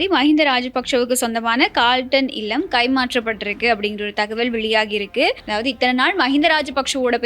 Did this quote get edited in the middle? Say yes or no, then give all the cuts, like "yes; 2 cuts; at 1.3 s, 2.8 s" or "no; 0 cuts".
yes; 1 cut; at 5.4 s